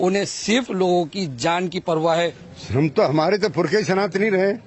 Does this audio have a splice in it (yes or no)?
yes